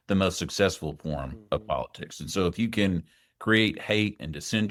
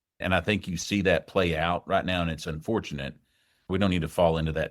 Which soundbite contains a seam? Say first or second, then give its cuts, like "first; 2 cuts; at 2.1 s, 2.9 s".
second; 1 cut; at 3.7 s